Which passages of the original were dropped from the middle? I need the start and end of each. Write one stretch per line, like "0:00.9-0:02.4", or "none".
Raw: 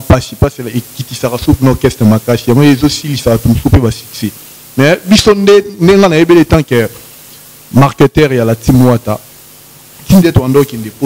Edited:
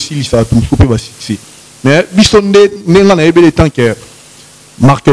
none